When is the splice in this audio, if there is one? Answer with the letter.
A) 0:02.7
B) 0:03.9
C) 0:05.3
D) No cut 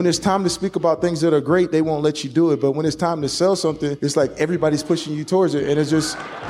B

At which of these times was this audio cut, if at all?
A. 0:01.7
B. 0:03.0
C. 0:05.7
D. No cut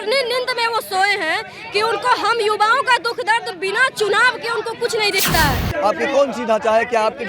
C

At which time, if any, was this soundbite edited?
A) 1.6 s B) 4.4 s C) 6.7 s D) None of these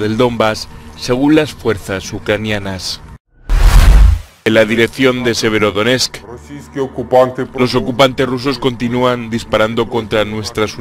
B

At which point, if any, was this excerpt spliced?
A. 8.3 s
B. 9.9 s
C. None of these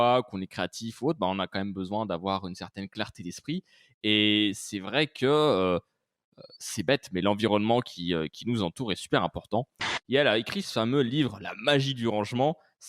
B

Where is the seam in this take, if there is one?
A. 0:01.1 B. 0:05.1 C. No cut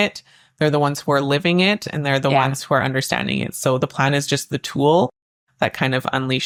C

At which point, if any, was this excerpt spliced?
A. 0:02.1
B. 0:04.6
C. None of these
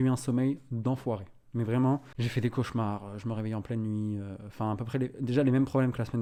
C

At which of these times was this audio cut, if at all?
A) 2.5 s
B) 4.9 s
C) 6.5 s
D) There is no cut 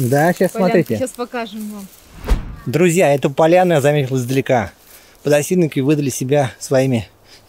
A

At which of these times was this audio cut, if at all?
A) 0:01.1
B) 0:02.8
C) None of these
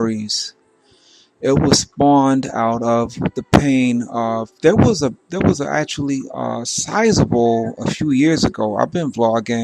B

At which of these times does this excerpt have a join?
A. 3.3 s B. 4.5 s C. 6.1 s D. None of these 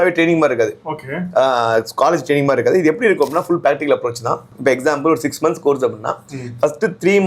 B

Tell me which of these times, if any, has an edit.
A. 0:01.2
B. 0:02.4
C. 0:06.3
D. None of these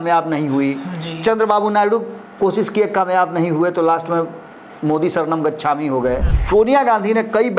C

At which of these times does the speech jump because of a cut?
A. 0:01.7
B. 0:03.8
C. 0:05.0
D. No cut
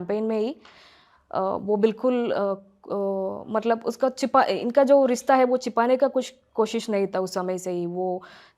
D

